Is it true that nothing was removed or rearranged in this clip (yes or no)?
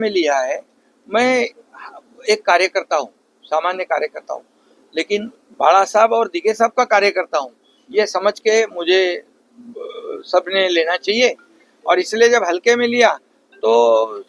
yes